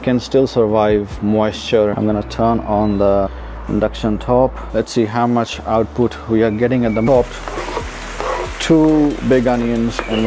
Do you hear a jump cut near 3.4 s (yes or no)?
no